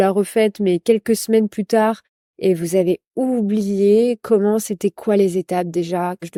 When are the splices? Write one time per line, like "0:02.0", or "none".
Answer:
none

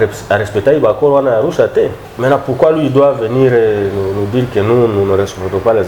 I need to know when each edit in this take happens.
0:02.0

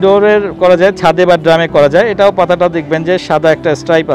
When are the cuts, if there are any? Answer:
none

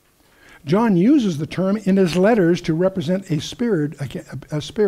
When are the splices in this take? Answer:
0:02.6

